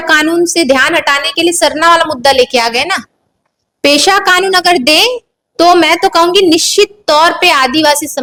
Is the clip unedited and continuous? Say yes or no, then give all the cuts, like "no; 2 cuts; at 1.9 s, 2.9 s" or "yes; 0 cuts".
yes; 0 cuts